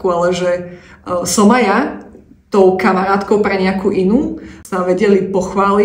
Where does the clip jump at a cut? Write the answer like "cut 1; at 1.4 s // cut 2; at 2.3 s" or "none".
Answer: cut 1; at 4.6 s